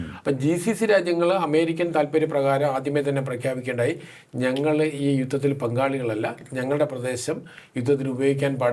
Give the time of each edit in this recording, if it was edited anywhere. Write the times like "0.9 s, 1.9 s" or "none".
none